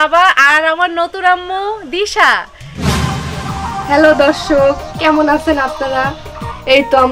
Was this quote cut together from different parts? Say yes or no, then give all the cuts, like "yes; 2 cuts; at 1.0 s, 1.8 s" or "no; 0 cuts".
yes; 1 cut; at 2.9 s